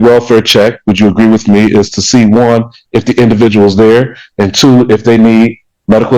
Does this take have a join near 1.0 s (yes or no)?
no